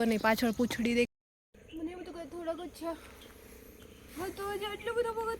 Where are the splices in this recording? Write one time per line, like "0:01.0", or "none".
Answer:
0:01.1